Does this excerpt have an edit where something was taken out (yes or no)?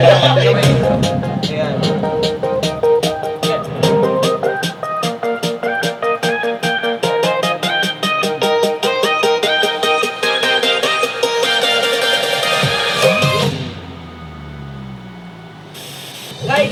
no